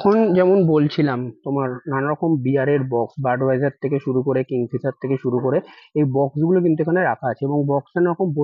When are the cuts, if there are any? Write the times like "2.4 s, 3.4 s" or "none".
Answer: none